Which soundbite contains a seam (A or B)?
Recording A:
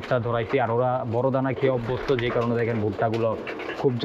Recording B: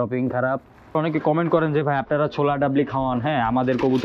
B